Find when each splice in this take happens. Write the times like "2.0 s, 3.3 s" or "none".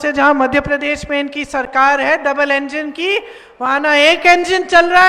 none

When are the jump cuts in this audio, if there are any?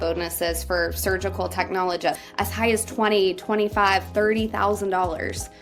2.2 s

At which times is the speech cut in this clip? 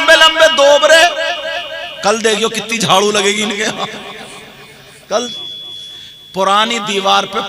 5.3 s

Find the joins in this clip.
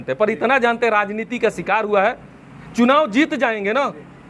none

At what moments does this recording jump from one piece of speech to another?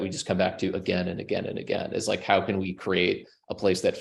none

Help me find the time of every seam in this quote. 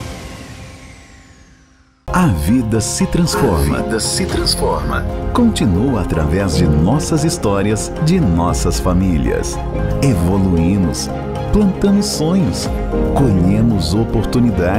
1.5 s

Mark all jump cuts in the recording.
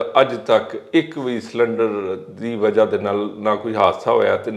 none

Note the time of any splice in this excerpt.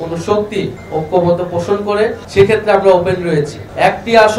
2.2 s, 3.6 s

